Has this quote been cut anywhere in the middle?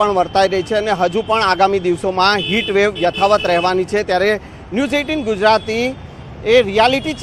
no; 0 cuts

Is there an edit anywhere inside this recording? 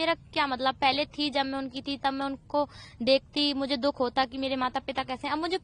no; 0 cuts

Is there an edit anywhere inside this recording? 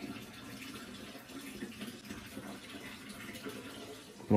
no; 0 cuts

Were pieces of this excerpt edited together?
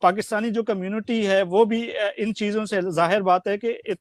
no; 0 cuts

